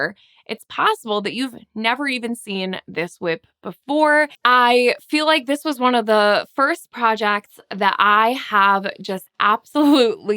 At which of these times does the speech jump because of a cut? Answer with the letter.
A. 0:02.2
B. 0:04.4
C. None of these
B